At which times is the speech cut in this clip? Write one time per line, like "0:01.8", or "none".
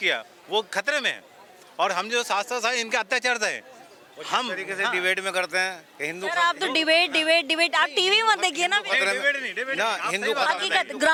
none